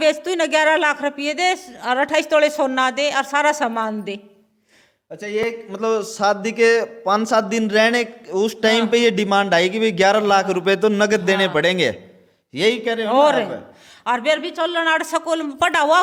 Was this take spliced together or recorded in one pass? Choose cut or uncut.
uncut